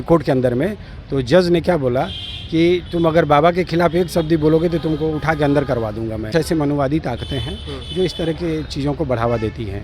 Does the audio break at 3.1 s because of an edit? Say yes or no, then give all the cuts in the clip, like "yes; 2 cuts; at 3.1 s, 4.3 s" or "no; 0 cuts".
no; 1 cut; at 6.3 s